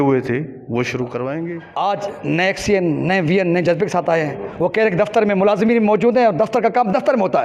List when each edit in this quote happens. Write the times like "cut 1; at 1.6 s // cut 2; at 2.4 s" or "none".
cut 1; at 1.6 s